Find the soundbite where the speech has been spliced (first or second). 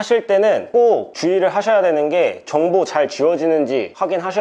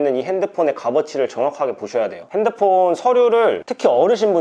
second